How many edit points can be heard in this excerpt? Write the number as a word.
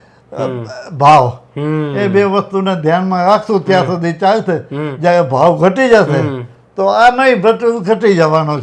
zero